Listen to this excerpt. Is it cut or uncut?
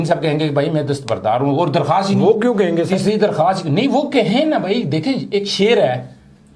uncut